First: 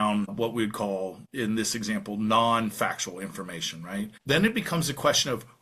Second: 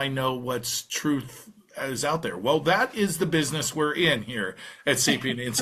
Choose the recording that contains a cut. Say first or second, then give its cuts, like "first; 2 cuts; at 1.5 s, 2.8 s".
first; 2 cuts; at 1.2 s, 4.2 s